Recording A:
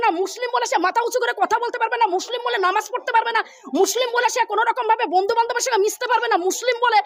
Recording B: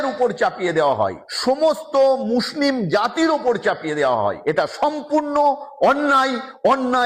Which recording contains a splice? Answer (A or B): B